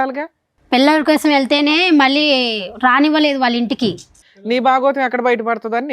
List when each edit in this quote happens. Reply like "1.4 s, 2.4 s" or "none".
4.1 s